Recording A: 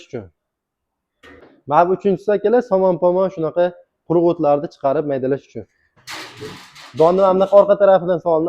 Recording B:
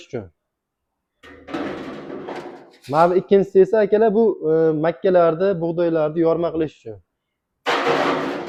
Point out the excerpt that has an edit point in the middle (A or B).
A